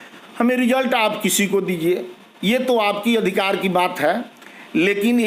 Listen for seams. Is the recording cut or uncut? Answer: uncut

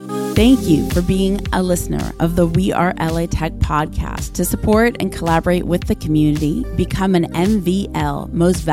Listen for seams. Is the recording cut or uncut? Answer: uncut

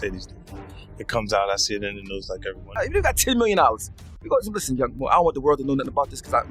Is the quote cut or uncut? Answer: cut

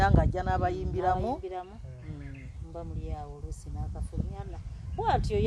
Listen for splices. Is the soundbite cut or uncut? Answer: uncut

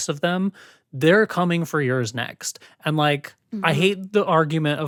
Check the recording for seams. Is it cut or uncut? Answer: uncut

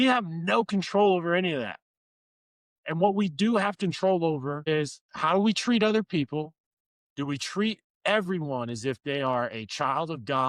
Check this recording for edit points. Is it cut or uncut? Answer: cut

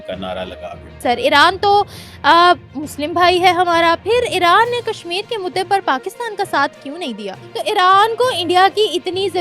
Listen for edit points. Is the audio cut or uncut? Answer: cut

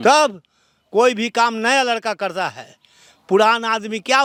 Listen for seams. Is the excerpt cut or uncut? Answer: uncut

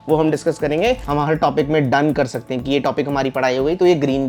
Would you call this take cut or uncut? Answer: cut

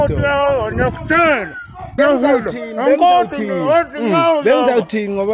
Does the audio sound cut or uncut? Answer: cut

